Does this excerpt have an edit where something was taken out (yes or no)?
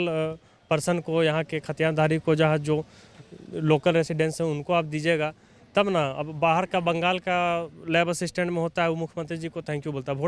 no